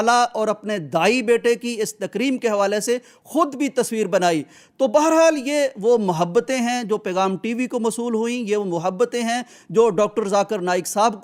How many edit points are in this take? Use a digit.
0